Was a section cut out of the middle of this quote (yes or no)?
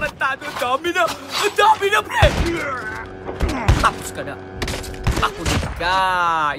no